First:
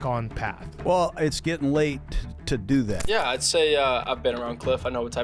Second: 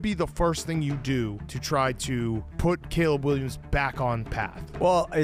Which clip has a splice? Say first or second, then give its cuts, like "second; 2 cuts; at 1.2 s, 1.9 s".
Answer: first; 1 cut; at 3.0 s